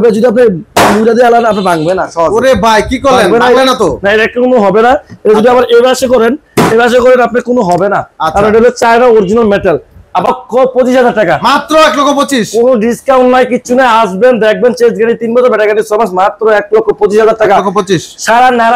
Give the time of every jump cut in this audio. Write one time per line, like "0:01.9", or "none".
0:10.3